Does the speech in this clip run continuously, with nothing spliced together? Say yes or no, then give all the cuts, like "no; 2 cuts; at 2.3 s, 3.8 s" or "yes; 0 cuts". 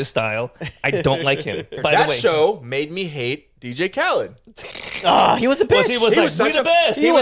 no; 1 cut; at 1.8 s